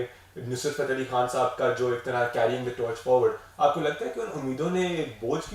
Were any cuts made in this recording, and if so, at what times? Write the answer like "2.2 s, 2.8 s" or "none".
none